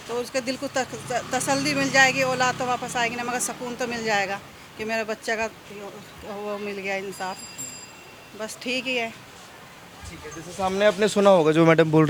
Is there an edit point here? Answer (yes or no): no